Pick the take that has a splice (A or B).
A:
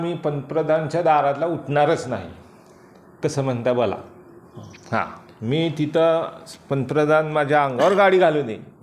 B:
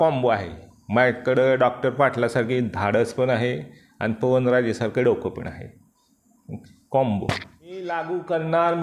B